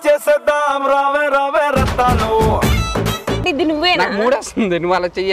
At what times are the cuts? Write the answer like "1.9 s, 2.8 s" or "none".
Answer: 3.4 s